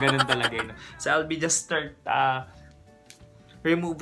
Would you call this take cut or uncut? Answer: cut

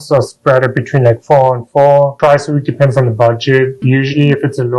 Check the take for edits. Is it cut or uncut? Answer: cut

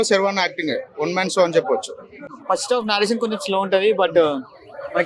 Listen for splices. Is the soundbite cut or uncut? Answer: cut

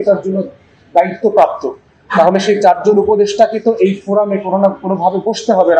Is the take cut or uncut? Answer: uncut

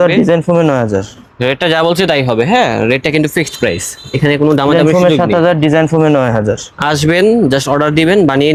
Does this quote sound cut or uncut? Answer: uncut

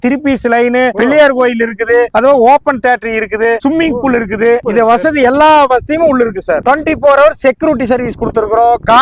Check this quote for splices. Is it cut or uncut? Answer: uncut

